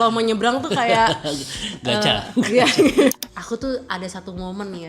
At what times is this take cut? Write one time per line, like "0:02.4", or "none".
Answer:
0:03.1